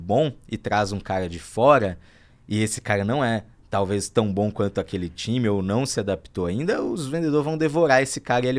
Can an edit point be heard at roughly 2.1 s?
no; 0 cuts

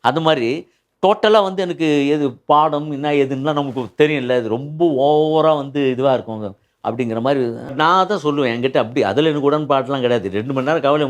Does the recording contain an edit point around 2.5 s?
no; 1 cut; at 7.7 s

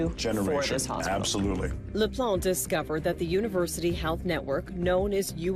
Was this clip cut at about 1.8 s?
no; 0 cuts

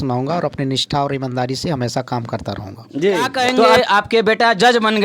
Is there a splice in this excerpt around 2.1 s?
no; 1 cut; at 3.5 s

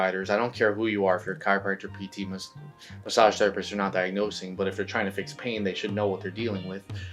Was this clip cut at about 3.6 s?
no; 0 cuts

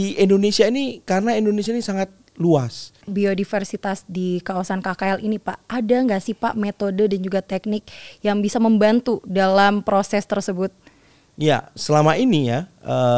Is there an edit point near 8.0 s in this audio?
no; 1 cut; at 3.0 s

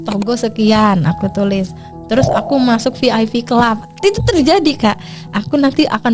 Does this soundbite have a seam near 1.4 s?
no; 0 cuts

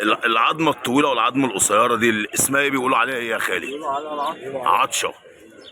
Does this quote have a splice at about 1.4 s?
no; 0 cuts

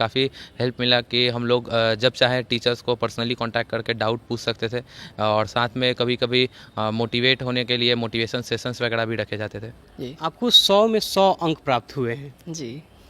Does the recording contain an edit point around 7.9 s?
no; 1 cut; at 9.8 s

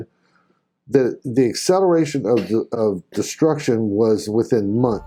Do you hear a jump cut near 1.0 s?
no; 0 cuts

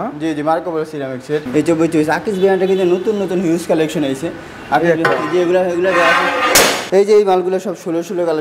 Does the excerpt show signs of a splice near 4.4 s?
no; 2 cuts; at 1.5 s, 6.8 s

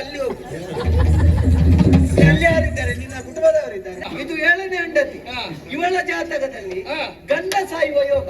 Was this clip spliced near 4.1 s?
yes; 1 cut; at 4.1 s

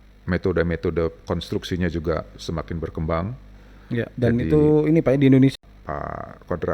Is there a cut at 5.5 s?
yes; 1 cut; at 5.5 s

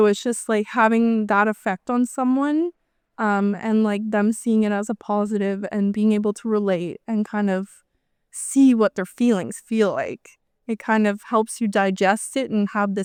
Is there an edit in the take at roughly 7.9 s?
no; 0 cuts

